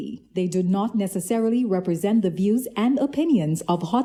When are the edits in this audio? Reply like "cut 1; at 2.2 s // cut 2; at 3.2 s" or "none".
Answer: none